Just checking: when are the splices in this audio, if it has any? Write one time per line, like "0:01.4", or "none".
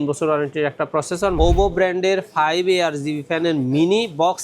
0:01.4